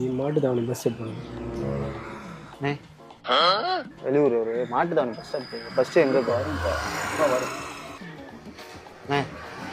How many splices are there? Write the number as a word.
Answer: two